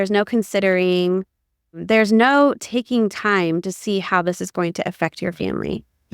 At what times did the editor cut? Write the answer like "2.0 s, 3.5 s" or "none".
1.8 s